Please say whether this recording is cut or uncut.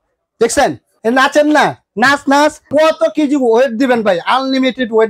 cut